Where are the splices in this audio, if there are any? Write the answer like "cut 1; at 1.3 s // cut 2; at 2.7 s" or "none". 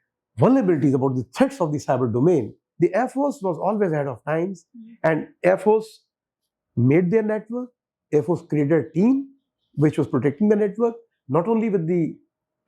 cut 1; at 2.6 s